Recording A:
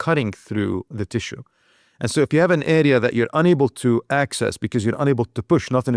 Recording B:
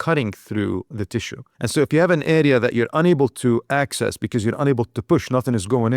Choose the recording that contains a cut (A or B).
B